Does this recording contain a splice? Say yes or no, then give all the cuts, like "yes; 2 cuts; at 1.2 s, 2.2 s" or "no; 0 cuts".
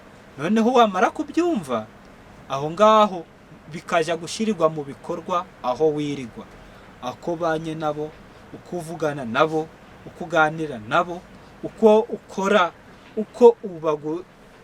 no; 0 cuts